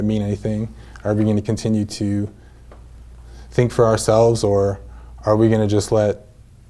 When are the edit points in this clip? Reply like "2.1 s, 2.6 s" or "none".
none